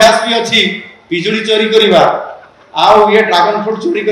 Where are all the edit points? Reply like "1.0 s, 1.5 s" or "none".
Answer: none